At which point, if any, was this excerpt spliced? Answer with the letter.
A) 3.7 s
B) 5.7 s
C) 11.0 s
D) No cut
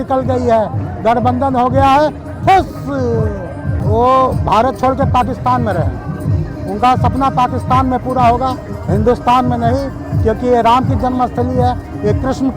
A